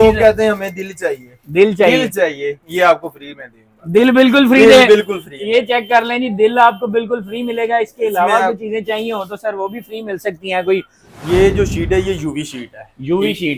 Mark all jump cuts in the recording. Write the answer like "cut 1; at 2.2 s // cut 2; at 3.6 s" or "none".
cut 1; at 11.0 s